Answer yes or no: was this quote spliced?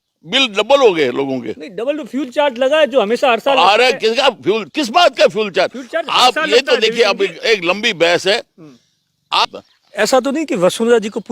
yes